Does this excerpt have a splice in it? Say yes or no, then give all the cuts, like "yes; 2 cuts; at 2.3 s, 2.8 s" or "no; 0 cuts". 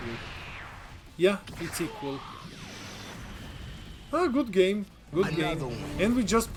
no; 0 cuts